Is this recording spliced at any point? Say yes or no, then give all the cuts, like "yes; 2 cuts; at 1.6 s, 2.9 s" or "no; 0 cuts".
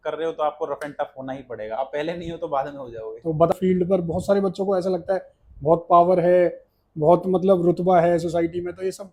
yes; 1 cut; at 3.5 s